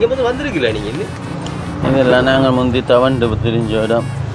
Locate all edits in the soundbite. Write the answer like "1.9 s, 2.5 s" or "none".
none